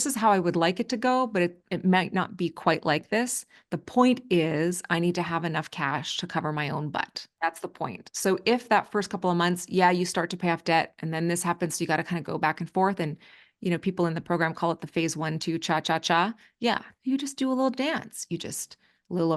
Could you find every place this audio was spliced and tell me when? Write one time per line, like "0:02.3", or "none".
0:07.2
0:16.9